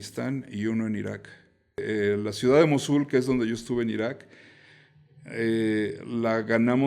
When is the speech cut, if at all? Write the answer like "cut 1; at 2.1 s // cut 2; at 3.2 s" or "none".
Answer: cut 1; at 1.8 s